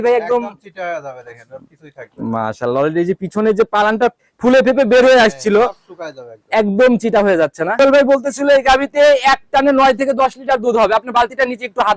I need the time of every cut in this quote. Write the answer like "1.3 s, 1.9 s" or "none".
4.3 s, 7.8 s